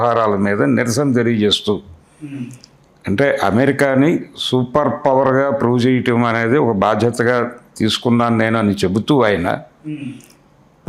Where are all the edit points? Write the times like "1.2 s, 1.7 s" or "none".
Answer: none